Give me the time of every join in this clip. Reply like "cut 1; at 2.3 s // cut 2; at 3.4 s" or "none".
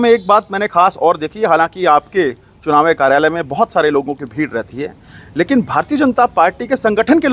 none